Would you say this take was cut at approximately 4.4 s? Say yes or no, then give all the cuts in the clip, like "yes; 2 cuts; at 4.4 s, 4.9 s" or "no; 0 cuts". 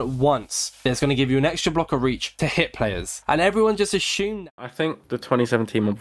yes; 1 cut; at 4.4 s